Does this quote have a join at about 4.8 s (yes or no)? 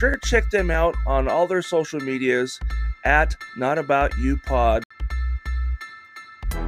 yes